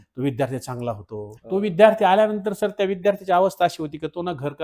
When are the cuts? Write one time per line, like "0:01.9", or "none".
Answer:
0:01.3